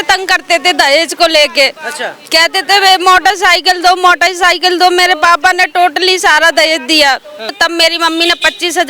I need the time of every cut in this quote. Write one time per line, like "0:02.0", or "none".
0:07.6